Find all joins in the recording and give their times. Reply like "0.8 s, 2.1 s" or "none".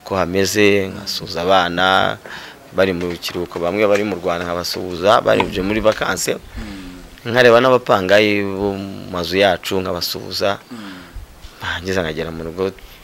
none